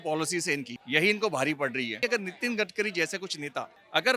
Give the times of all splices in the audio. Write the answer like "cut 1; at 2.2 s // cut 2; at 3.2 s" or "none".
cut 1; at 2.0 s